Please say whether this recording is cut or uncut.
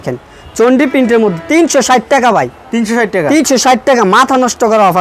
uncut